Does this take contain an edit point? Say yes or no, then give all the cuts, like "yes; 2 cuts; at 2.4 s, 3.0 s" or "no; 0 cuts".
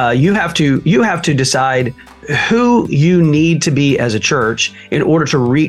no; 0 cuts